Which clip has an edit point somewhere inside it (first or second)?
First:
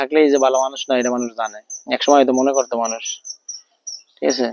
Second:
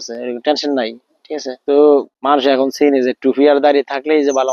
second